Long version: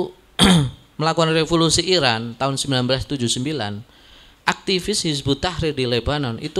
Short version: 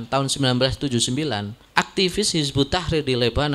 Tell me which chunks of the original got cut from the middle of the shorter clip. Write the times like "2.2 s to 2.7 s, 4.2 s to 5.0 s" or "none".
3.8 s to 4.3 s